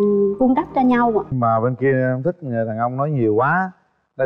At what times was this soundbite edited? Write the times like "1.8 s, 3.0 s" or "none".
1.3 s